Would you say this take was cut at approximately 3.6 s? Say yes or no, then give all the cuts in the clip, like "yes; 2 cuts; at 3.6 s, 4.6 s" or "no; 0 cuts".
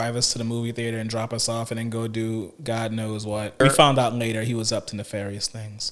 yes; 1 cut; at 3.6 s